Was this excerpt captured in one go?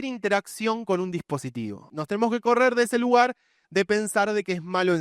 no; 1 cut; at 1.9 s

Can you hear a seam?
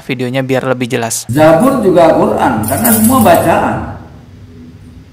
yes; 1 cut; at 1.2 s

